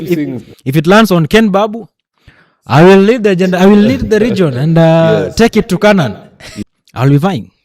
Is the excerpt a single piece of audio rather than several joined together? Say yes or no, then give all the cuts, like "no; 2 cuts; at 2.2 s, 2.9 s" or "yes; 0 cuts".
no; 1 cut; at 6.5 s